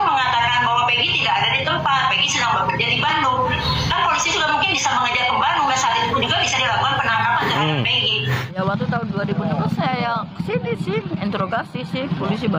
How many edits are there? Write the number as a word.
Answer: one